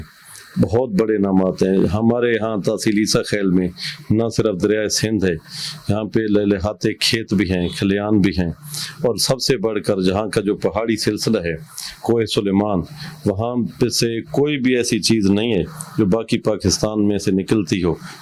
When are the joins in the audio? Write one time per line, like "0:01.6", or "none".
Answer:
none